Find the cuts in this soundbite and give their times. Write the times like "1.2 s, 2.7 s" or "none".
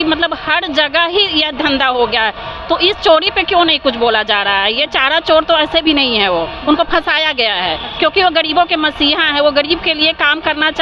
none